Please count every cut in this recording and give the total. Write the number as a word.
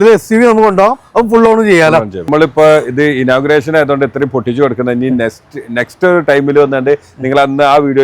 one